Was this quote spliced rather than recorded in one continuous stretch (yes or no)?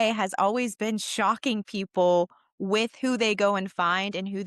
no